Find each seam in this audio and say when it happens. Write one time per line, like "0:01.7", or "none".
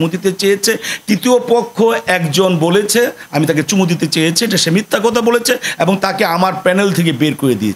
none